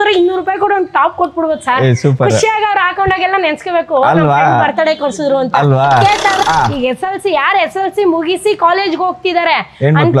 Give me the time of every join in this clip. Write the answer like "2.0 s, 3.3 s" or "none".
6.4 s